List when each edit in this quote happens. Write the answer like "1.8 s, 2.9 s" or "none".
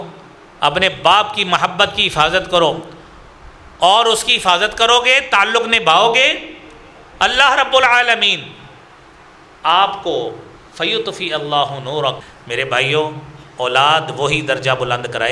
12.3 s